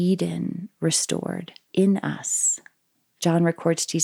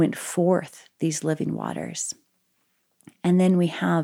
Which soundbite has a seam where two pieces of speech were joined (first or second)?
first